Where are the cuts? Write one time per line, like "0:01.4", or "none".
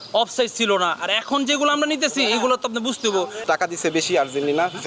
0:03.4

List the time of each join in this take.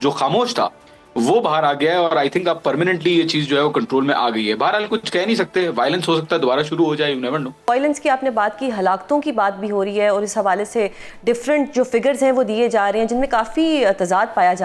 0:07.6

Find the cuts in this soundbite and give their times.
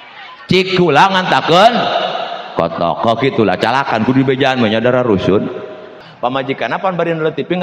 0:06.0

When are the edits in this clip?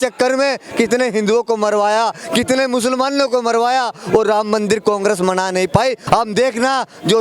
0:06.0

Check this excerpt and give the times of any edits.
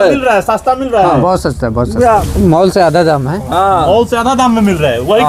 none

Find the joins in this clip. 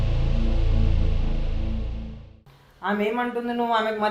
0:02.4

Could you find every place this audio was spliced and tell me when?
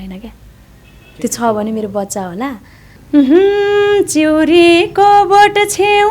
0:03.0

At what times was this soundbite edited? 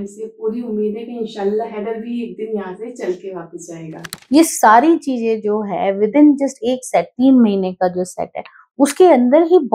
0:04.1

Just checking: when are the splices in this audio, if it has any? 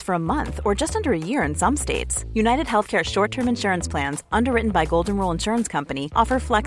none

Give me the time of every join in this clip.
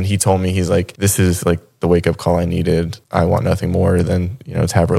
0:00.9
0:03.0

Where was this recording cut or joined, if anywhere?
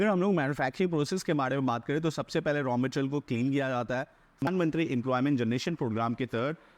0:04.4

